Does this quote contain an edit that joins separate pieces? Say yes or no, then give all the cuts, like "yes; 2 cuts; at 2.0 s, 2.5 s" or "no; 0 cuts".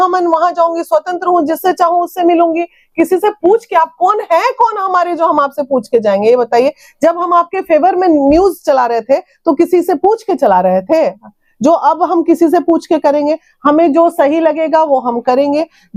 no; 0 cuts